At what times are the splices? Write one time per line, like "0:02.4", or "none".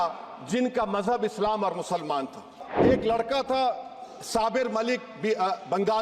0:02.7